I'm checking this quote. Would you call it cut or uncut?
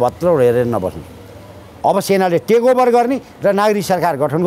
uncut